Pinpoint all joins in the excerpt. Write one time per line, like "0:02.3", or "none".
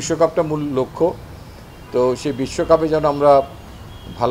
none